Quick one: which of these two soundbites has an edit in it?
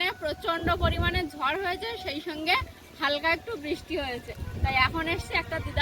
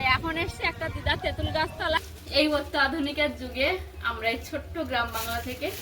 second; 1 cut; at 2.1 s

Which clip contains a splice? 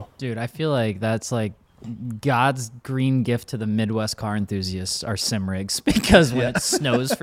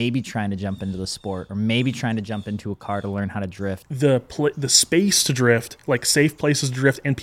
second; 1 cut; at 3.8 s

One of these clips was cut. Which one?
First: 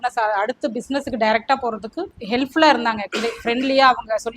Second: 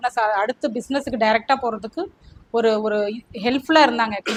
first; 1 cut; at 2.1 s

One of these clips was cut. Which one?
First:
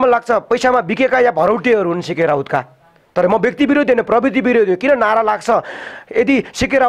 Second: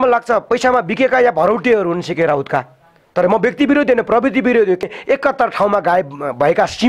second; 1 cut; at 4.8 s

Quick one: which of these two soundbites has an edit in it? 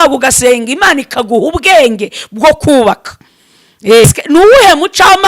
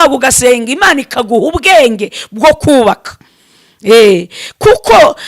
first; 1 cut; at 4.0 s

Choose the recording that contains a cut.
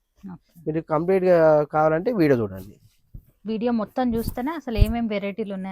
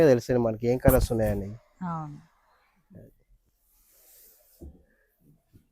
second; 1 cut; at 3.3 s

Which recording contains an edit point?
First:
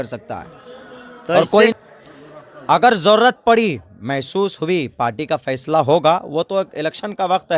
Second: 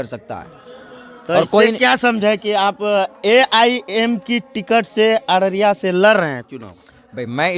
first; 1 cut; at 1.8 s

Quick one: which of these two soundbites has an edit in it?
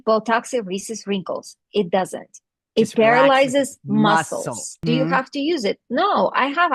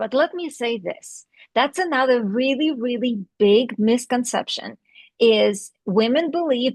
first; 1 cut; at 4.6 s

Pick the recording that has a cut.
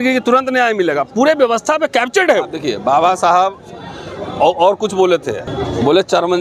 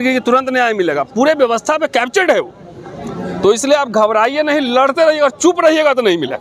first; 2 cuts; at 2.6 s, 5.4 s

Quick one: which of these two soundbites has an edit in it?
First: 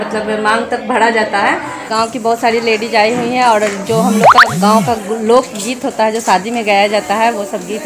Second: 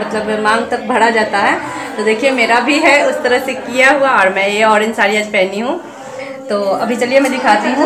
first; 1 cut; at 1.9 s

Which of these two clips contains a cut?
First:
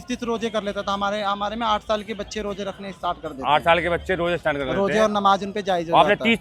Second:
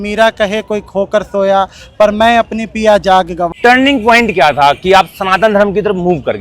second; 1 cut; at 3.5 s

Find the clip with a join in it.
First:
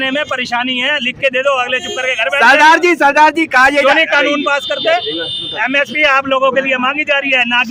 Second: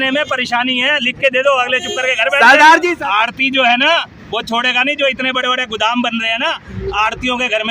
second; 1 cut; at 2.9 s

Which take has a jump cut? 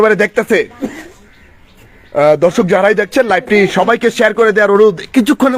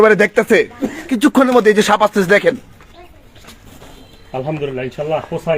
second; 1 cut; at 1.1 s

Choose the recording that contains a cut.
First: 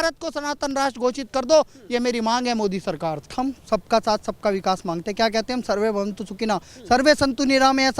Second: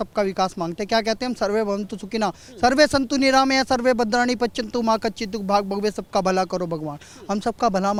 first; 1 cut; at 3.3 s

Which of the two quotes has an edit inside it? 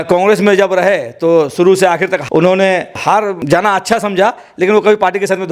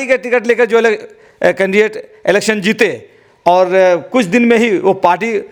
first; 2 cuts; at 2.2 s, 3.2 s

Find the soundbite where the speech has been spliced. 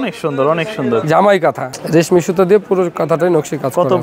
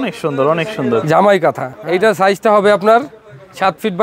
first; 1 cut; at 1.7 s

